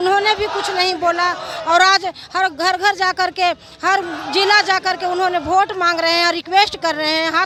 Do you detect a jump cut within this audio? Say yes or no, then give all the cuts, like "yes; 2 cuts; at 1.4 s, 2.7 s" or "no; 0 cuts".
no; 0 cuts